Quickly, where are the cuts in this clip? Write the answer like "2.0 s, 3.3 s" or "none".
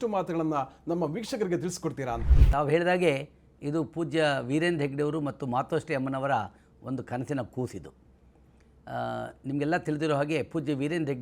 2.4 s